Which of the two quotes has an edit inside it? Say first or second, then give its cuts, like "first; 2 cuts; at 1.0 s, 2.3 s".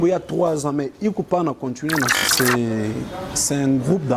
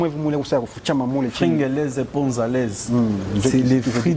first; 1 cut; at 2.3 s